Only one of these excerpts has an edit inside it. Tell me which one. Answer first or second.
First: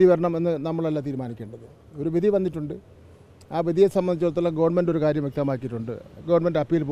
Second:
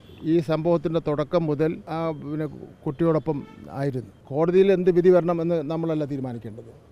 second